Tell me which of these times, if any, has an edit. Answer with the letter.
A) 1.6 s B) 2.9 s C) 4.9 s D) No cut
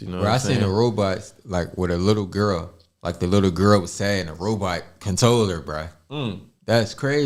D